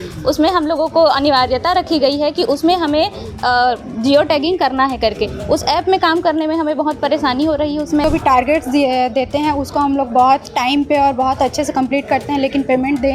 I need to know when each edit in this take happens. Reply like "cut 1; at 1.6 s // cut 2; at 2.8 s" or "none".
cut 1; at 8.0 s